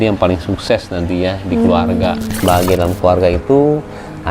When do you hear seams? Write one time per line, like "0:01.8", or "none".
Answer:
0:02.4